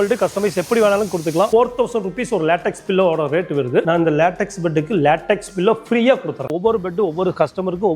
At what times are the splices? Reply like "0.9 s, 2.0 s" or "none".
1.5 s, 3.8 s, 6.5 s